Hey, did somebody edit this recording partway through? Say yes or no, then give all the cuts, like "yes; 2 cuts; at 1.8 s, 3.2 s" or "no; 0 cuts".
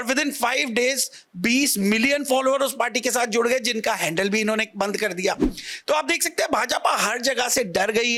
no; 0 cuts